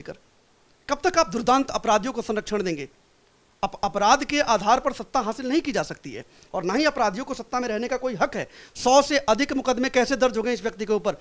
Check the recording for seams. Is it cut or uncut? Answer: uncut